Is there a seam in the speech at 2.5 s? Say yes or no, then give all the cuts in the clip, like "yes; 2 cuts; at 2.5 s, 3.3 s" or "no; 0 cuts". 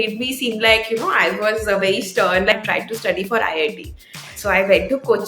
yes; 1 cut; at 2.5 s